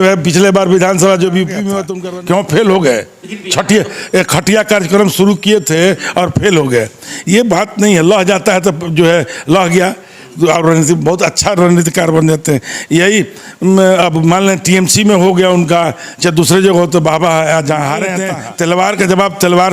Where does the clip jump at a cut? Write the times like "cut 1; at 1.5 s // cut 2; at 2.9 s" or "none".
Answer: cut 1; at 1.9 s // cut 2; at 18.2 s